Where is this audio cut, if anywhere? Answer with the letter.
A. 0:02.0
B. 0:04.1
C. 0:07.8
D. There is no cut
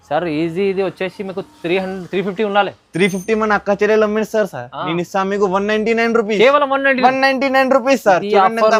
D